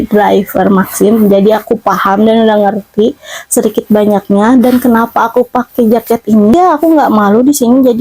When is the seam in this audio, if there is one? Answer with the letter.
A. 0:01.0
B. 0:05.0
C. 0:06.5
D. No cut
C